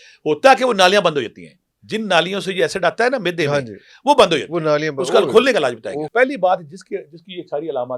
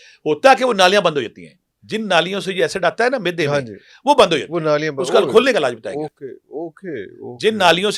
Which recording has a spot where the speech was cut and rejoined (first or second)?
first